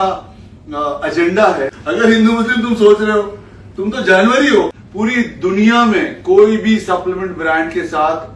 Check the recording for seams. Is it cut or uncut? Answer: cut